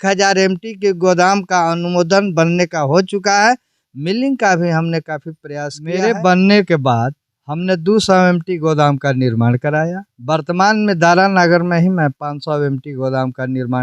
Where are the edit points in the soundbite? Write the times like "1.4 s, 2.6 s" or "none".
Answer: 5.8 s